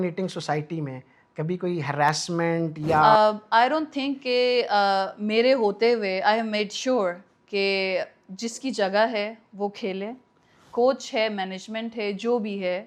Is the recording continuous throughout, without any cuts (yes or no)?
no